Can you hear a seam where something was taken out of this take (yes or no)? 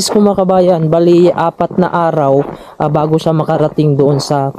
no